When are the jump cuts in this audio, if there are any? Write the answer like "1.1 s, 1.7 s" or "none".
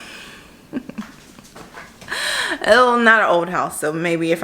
none